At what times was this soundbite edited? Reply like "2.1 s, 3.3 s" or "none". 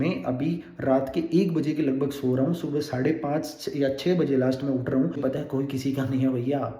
5.2 s